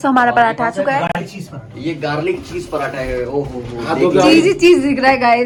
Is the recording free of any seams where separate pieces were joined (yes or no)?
yes